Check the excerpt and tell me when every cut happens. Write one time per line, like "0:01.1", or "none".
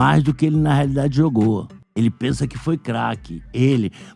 0:01.8